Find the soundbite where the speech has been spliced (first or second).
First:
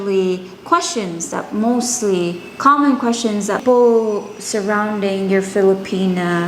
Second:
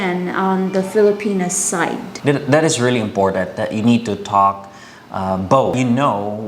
second